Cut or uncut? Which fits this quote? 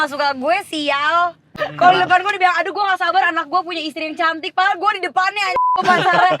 cut